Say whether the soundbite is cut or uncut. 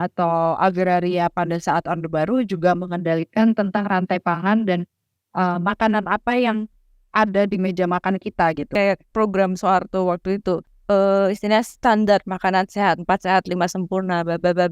cut